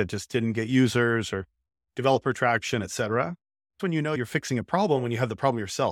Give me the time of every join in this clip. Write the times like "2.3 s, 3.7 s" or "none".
4.1 s